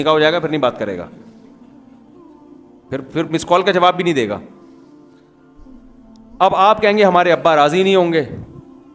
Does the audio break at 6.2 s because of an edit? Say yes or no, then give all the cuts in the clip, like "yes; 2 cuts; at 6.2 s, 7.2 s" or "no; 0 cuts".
no; 2 cuts; at 1.1 s, 2.7 s